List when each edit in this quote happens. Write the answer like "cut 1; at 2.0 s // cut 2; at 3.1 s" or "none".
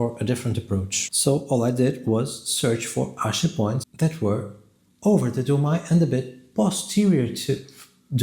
cut 1; at 1.0 s